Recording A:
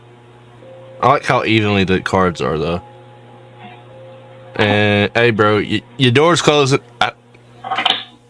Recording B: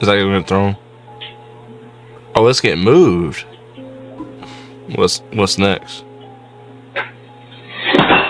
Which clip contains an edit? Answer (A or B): B